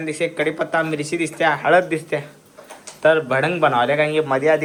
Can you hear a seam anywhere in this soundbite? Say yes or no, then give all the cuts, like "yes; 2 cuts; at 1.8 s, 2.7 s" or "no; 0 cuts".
no; 0 cuts